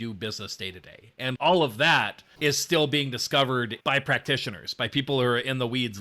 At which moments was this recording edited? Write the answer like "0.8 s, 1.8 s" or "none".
1.3 s, 2.2 s